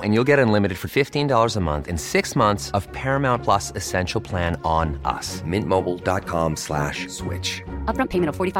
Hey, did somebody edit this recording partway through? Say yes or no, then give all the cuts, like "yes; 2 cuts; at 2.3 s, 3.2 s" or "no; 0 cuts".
no; 0 cuts